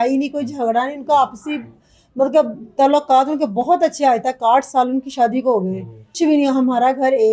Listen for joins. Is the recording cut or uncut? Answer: uncut